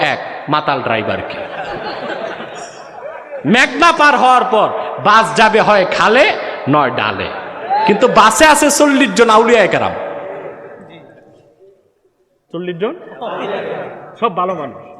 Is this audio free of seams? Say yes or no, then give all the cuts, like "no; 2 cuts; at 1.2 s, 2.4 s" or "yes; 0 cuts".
yes; 0 cuts